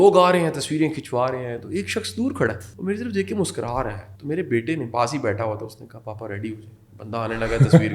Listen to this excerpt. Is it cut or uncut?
cut